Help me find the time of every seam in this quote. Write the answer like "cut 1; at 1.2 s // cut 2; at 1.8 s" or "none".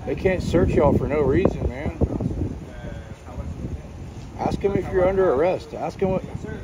none